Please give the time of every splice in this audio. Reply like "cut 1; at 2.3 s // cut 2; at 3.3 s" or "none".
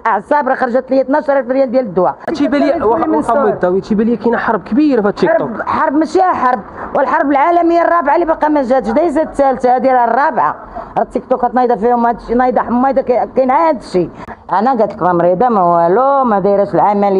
cut 1; at 2.2 s // cut 2; at 14.2 s